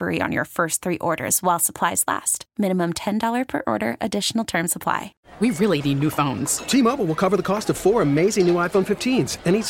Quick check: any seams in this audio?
yes; 1 cut; at 5.2 s

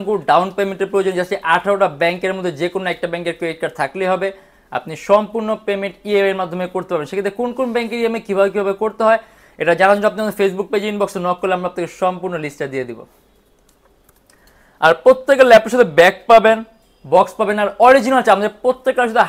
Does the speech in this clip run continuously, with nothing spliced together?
yes; 0 cuts

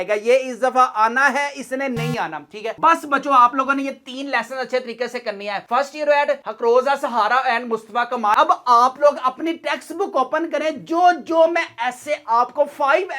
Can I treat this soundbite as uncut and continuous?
no; 2 cuts; at 2.8 s, 8.4 s

